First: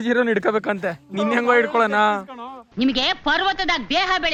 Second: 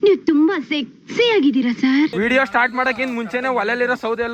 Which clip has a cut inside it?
second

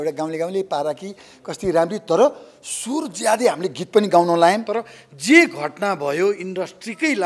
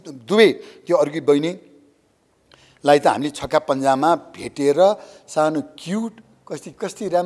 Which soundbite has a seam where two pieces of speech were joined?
first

